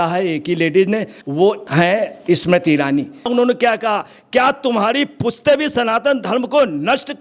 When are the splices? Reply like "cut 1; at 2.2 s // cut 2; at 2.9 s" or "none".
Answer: cut 1; at 1.6 s // cut 2; at 3.3 s